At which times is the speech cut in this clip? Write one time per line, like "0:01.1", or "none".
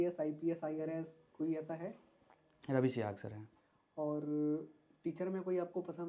none